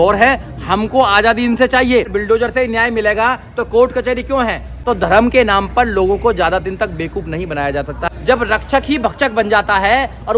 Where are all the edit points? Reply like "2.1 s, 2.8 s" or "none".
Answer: 2.1 s, 4.8 s, 8.1 s